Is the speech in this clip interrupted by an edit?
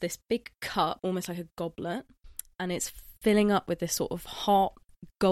yes; 1 cut; at 1.0 s

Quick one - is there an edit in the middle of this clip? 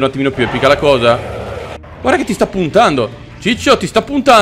yes; 1 cut; at 1.9 s

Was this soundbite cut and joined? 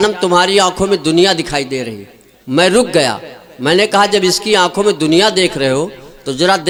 no; 0 cuts

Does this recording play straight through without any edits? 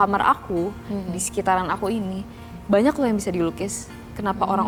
yes; 0 cuts

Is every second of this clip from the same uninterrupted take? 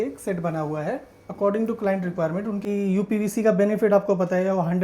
no; 1 cut; at 2.6 s

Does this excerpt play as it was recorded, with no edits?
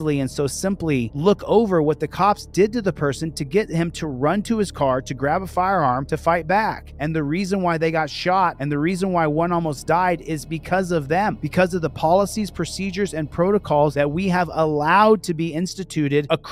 yes; 0 cuts

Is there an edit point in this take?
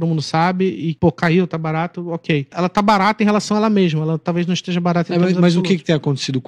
yes; 2 cuts; at 0.9 s, 2.5 s

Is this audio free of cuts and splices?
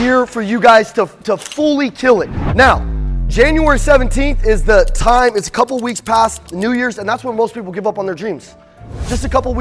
no; 2 cuts; at 4.4 s, 6.5 s

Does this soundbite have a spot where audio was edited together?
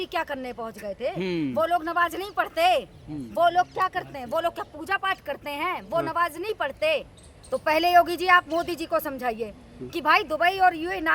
no; 0 cuts

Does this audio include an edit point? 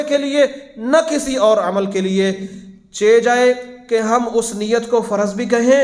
no; 0 cuts

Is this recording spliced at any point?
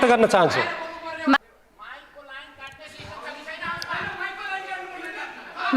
yes; 1 cut; at 1.4 s

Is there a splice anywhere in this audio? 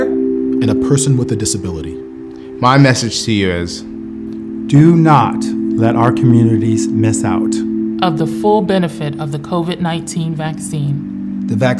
no; 0 cuts

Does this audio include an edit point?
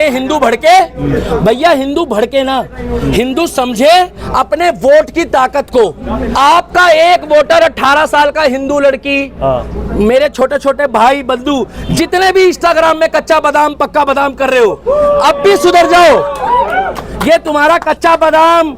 yes; 1 cut; at 6.3 s

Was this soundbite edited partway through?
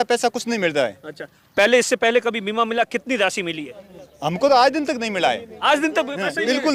no; 0 cuts

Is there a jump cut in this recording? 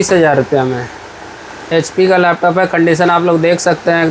no; 0 cuts

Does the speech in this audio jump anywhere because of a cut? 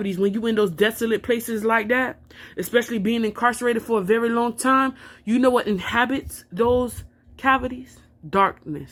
no; 0 cuts

